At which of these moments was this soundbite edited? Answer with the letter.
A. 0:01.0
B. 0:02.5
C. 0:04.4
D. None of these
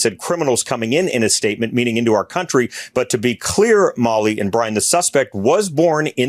D